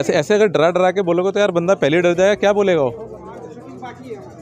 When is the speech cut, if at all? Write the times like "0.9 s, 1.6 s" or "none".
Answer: none